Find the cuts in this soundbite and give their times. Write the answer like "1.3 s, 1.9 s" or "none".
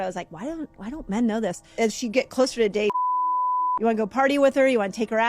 1.6 s